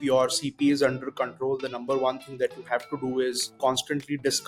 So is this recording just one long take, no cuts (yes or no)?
yes